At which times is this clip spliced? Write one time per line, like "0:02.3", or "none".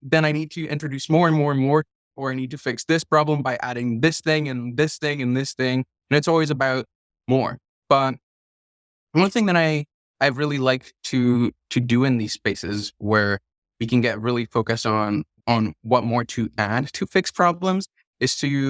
0:02.2